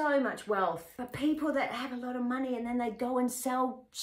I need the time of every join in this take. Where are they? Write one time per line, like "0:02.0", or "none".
0:01.0